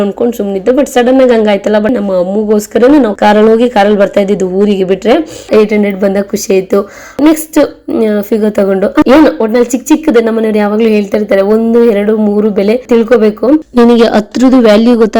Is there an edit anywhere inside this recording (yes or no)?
yes